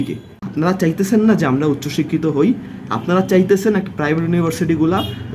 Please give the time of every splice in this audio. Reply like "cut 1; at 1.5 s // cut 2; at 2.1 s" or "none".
none